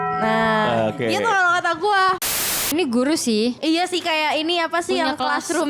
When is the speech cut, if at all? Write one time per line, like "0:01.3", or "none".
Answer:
0:02.4